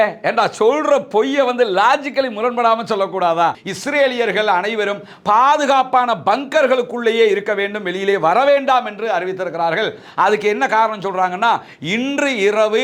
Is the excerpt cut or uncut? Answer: cut